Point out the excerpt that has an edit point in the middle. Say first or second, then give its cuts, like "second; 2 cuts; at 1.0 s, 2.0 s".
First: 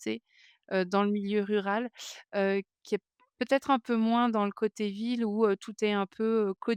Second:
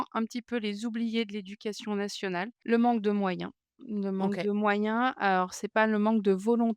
second; 1 cut; at 2.6 s